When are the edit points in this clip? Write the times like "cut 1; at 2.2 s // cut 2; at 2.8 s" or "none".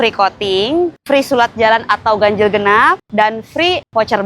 cut 1; at 1.0 s